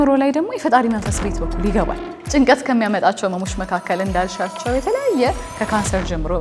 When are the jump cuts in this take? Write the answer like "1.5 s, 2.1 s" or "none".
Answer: 2.1 s